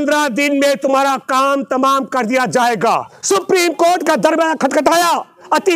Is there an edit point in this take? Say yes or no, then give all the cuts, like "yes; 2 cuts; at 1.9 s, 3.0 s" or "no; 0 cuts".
yes; 1 cut; at 3.1 s